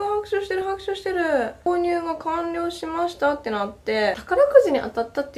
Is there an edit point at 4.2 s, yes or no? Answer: yes